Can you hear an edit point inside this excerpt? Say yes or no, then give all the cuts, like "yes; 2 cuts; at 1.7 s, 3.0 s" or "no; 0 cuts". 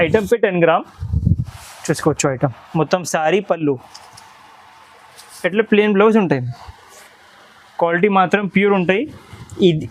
no; 0 cuts